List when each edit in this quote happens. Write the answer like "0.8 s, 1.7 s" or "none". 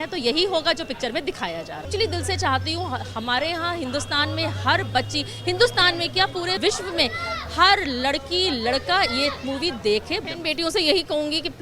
1.9 s, 10.2 s